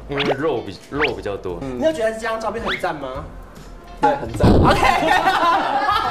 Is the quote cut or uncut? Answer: cut